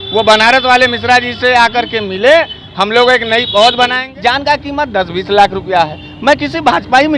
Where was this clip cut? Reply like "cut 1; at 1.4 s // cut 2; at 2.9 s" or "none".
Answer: cut 1; at 4.0 s